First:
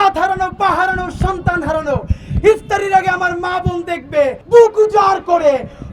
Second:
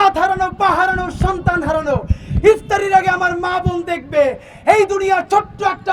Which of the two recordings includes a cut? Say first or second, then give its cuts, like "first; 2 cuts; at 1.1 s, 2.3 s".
first; 1 cut; at 4.4 s